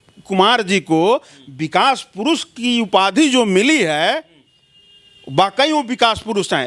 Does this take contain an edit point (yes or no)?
no